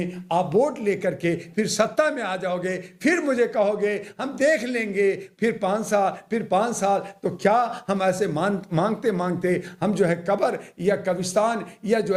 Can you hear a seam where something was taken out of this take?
no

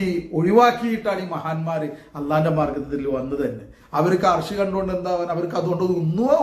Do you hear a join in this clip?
no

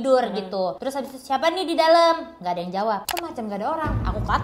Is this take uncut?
no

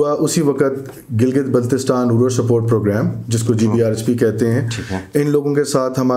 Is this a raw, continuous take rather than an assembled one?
yes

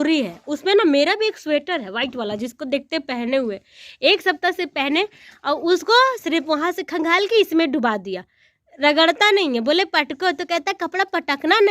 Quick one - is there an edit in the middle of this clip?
no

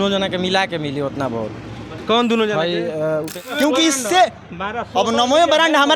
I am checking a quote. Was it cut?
yes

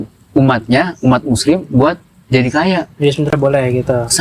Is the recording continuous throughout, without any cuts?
yes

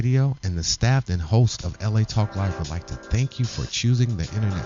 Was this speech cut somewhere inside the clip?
no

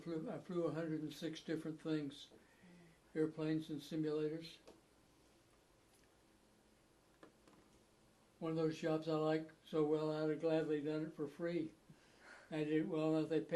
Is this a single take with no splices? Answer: no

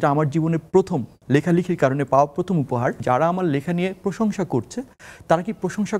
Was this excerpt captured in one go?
no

